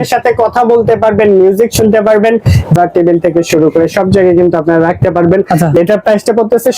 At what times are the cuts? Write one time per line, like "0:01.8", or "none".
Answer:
0:02.8
0:05.8